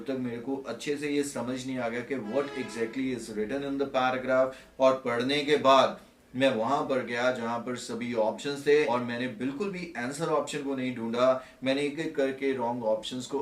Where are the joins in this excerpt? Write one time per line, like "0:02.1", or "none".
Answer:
0:08.9